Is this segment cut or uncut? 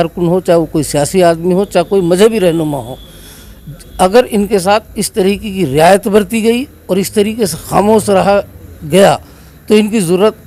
uncut